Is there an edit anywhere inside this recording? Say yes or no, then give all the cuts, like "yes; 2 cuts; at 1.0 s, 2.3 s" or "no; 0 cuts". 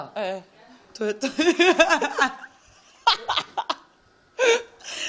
no; 0 cuts